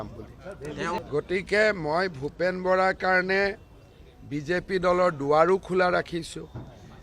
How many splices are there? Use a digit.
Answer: 1